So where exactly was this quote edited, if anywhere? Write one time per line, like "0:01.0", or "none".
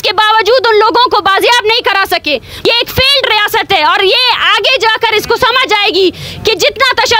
0:02.7